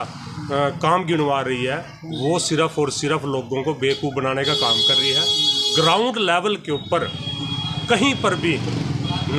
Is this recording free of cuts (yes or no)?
yes